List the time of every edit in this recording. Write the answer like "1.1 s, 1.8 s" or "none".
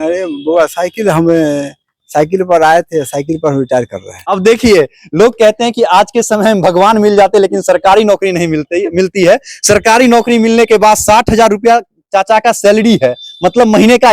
4.3 s